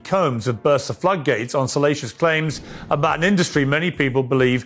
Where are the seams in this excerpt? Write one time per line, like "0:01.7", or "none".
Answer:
none